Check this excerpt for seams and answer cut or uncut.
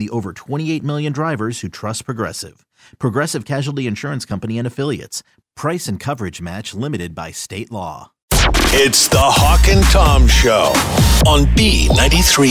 cut